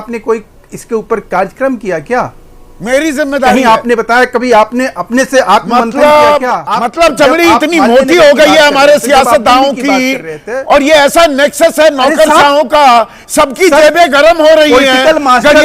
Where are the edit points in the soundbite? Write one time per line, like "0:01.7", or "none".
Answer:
0:06.6